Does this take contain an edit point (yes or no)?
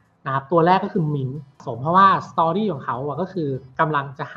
yes